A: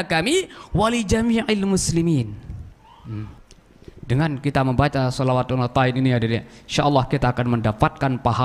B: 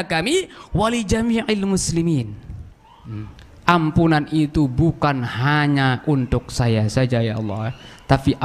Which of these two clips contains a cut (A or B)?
A